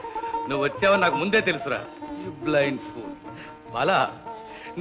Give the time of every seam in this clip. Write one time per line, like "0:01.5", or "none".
0:01.9